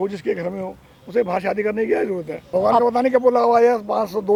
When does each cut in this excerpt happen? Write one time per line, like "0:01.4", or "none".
none